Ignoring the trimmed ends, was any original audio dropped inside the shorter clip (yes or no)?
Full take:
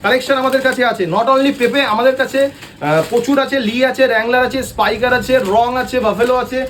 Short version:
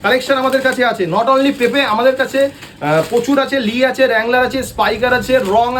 no